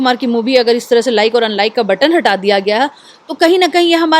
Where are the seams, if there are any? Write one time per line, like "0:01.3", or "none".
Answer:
none